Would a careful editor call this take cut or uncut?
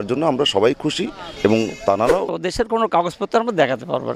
cut